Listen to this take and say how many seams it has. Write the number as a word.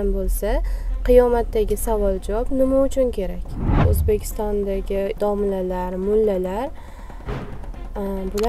one